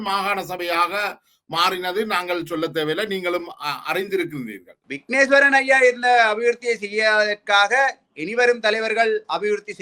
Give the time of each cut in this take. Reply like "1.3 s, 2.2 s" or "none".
4.8 s

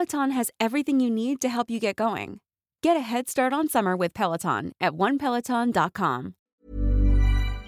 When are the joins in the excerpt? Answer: 6.5 s

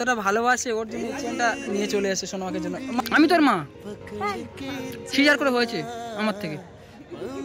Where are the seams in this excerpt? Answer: 3.0 s

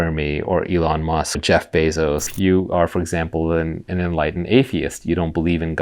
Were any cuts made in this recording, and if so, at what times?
1.4 s, 2.3 s

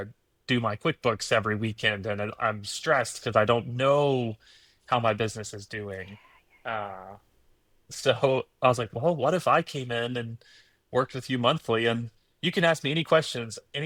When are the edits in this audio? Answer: none

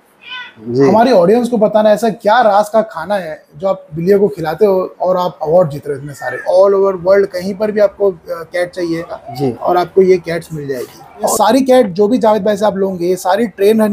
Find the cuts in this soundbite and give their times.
6.4 s, 9.2 s, 11.3 s

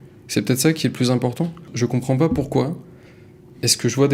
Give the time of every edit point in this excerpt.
1.7 s

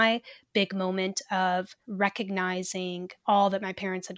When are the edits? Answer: 1.8 s, 3.1 s

